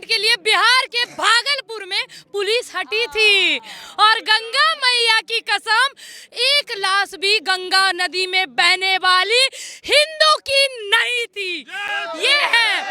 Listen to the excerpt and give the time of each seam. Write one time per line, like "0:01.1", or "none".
none